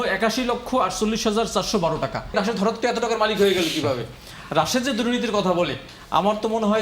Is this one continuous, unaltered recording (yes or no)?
no